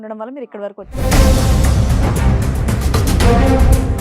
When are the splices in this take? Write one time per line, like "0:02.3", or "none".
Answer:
0:01.0